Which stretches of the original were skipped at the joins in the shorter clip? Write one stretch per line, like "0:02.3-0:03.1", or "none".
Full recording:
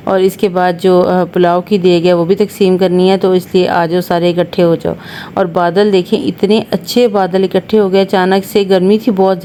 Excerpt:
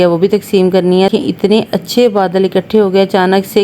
0:03.2-0:06.1